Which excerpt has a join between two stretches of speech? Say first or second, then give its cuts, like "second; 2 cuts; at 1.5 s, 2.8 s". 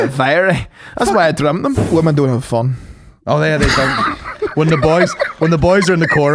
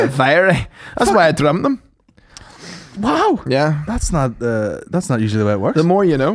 first; 1 cut; at 1.8 s